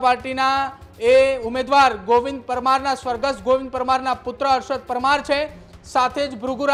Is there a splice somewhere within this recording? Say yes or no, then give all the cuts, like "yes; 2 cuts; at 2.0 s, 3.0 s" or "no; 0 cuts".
no; 0 cuts